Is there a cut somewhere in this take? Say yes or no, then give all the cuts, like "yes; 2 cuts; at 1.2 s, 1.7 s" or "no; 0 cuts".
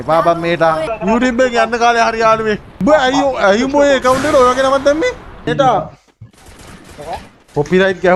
yes; 3 cuts; at 0.9 s, 2.7 s, 5.5 s